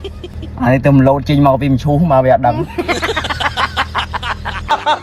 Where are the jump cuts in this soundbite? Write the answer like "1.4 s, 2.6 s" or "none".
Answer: none

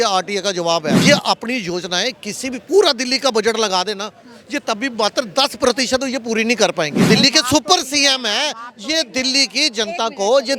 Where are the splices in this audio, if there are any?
1.0 s, 7.0 s

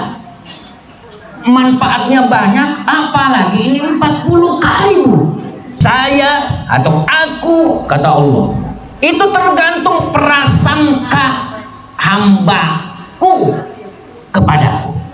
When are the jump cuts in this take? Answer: 5.6 s

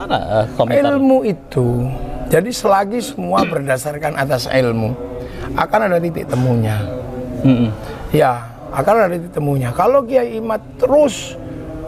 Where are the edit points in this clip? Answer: none

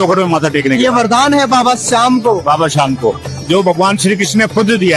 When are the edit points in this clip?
none

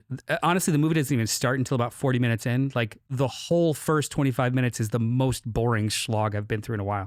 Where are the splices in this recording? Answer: none

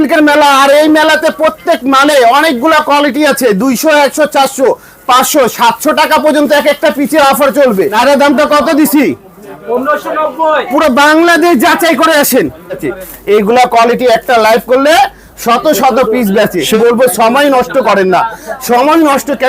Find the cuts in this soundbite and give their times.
7.9 s, 12.8 s, 16.8 s

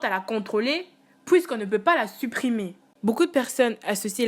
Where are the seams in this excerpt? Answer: 2.9 s

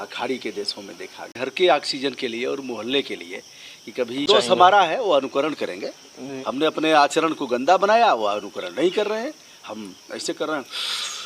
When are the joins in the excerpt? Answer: 1.3 s, 4.3 s

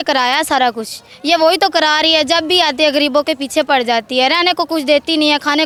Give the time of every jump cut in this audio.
none

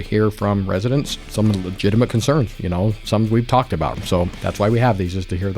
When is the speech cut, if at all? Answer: 1.2 s, 4.0 s

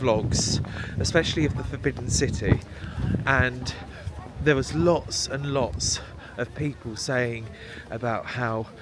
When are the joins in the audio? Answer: none

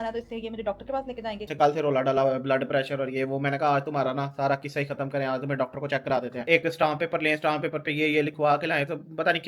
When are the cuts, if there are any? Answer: 1.5 s, 6.4 s

